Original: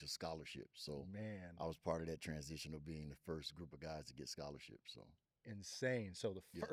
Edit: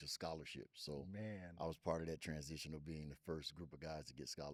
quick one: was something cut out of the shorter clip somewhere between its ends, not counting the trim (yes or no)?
no